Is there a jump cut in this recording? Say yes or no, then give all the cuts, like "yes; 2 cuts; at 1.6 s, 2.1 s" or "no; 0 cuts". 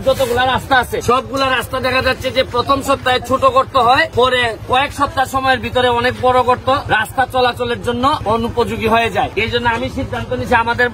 yes; 5 cuts; at 1.0 s, 4.1 s, 6.8 s, 8.2 s, 9.3 s